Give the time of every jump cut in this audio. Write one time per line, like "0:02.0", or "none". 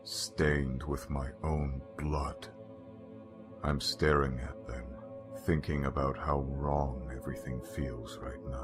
0:06.0